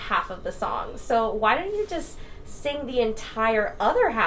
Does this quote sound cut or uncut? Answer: uncut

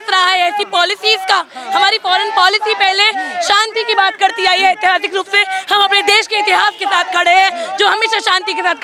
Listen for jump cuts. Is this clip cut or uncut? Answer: uncut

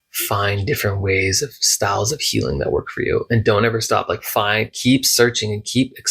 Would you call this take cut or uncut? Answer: uncut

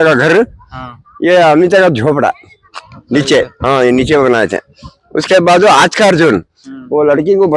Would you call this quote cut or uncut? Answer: uncut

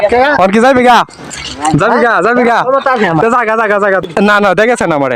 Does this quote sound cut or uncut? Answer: cut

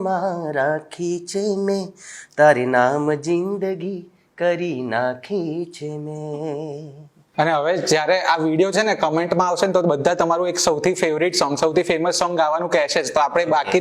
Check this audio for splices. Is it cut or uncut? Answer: uncut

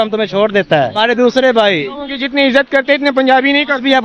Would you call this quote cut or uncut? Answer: cut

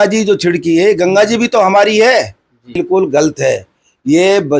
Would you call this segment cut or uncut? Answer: cut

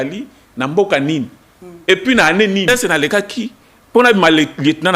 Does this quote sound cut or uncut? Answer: cut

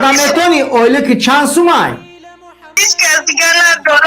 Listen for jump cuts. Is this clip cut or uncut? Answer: cut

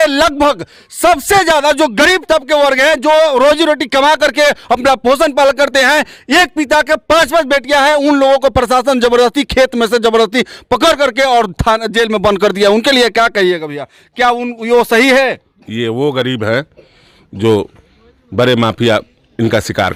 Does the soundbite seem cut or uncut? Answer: uncut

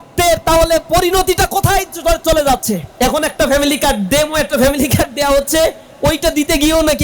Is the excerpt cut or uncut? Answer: cut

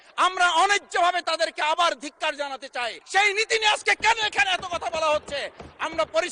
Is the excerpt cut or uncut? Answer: cut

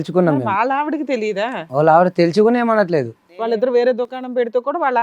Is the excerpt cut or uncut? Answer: cut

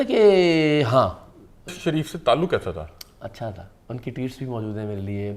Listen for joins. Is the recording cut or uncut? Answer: cut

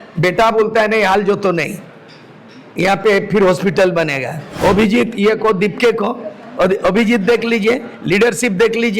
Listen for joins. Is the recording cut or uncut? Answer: cut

